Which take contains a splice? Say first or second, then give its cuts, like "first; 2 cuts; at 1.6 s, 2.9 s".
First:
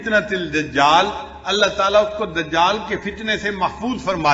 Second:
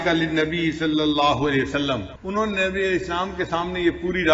second; 1 cut; at 2.1 s